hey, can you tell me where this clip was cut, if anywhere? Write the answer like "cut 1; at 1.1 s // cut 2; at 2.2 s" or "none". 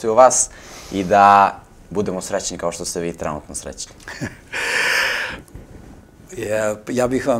none